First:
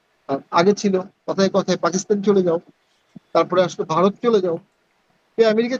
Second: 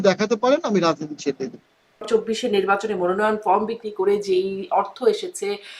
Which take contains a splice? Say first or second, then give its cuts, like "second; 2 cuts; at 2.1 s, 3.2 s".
second; 1 cut; at 2.0 s